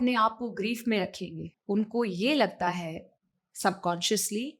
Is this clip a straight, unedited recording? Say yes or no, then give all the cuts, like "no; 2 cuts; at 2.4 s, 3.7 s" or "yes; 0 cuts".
no; 1 cut; at 1.5 s